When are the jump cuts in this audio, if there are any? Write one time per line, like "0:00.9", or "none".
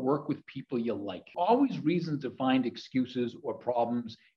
0:01.3